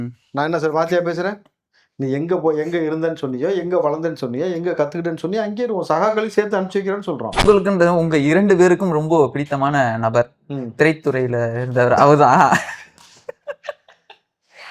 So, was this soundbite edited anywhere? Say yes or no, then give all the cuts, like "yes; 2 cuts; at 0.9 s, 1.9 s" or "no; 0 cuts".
yes; 1 cut; at 7.4 s